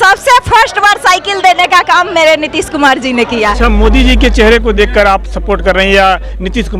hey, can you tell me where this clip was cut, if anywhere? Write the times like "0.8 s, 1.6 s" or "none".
3.5 s